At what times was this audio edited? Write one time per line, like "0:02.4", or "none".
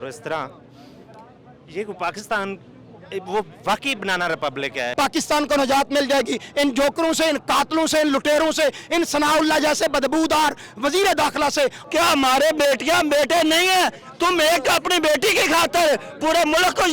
0:04.9
0:11.8